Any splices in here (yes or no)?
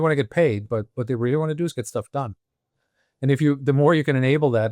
no